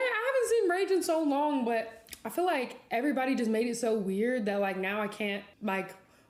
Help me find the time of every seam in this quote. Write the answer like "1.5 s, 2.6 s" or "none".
none